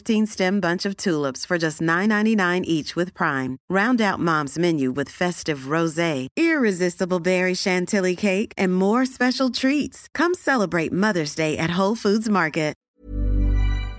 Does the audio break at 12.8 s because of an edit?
yes; 1 cut; at 12.8 s

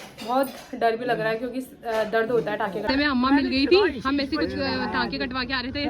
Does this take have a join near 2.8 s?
yes; 1 cut; at 2.8 s

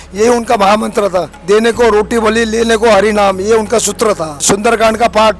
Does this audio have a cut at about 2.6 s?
no; 2 cuts; at 1.3 s, 4.4 s

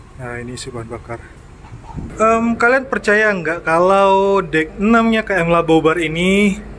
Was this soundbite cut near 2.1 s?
yes; 1 cut; at 2.1 s

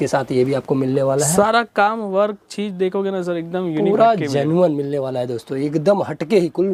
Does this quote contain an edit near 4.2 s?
no; 0 cuts

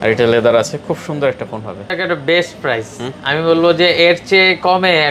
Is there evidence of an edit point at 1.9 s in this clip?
yes; 1 cut; at 1.9 s

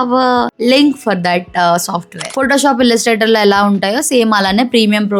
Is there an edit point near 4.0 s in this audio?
no; 1 cut; at 2.3 s

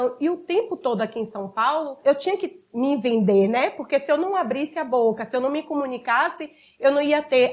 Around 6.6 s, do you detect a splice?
no; 1 cut; at 2.0 s

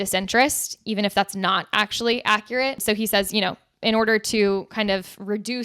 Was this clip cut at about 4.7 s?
no; 1 cut; at 2.8 s

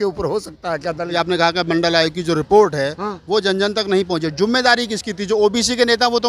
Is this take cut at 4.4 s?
no; 1 cut; at 1.1 s

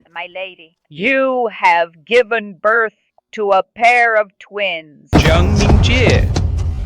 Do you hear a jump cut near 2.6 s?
no; 1 cut; at 5.1 s

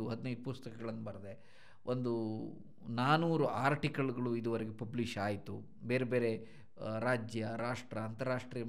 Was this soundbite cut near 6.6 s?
no; 0 cuts

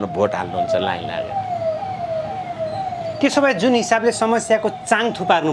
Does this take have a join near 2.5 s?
no; 0 cuts

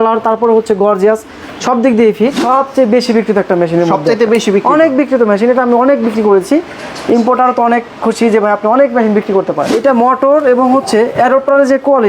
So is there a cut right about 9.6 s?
yes; 2 cuts; at 2.4 s, 9.6 s

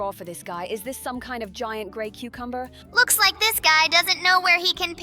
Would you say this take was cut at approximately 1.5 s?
no; 1 cut; at 2.8 s

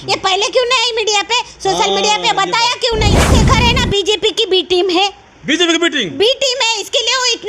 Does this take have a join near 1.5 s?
no; 1 cut; at 3.3 s

